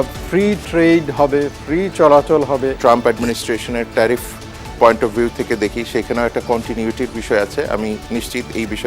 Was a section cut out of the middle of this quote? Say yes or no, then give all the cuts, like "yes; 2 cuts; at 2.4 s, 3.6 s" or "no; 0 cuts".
yes; 1 cut; at 2.7 s